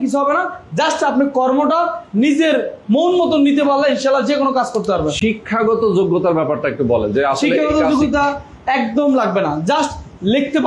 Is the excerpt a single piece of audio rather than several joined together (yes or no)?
yes